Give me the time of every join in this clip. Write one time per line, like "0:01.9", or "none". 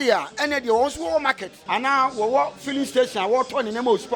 0:01.5